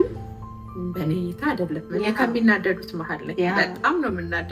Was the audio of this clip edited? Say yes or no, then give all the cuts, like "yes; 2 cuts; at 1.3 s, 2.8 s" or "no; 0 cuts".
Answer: no; 0 cuts